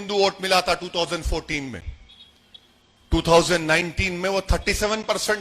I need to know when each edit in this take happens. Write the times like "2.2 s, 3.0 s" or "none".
none